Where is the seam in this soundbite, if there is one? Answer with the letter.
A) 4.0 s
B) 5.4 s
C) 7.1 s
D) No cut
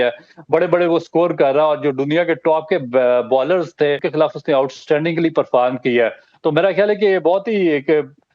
A